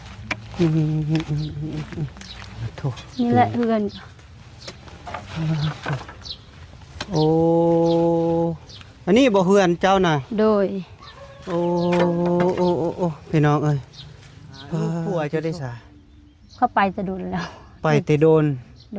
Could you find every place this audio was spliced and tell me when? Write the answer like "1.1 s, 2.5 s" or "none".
2.6 s, 15.0 s